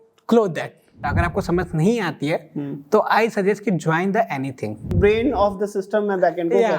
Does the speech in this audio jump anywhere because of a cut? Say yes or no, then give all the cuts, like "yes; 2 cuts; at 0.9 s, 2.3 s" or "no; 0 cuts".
yes; 2 cuts; at 1.0 s, 4.9 s